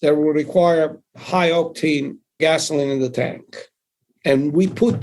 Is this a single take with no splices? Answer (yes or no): no